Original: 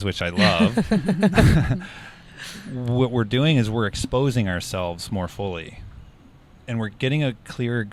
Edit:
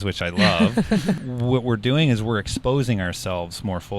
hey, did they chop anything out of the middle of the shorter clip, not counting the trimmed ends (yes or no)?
yes